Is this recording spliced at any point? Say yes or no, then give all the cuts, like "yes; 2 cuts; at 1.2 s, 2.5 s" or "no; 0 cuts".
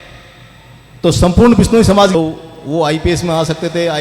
yes; 1 cut; at 2.1 s